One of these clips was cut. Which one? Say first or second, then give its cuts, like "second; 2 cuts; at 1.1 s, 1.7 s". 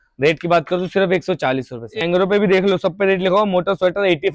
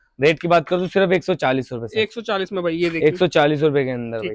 first; 1 cut; at 2.0 s